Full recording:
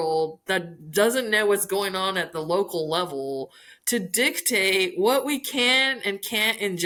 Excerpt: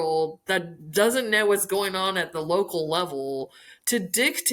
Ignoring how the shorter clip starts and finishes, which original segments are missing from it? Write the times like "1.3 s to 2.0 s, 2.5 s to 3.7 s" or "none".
none